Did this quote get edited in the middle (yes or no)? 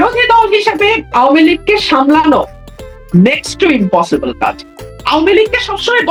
no